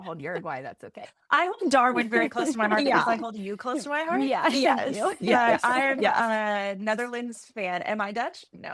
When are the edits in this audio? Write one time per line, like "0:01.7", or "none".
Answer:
0:01.1